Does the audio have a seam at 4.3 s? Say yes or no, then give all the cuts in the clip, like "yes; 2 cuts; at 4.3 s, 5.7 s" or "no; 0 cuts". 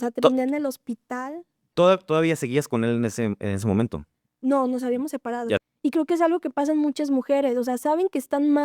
no; 1 cut; at 5.6 s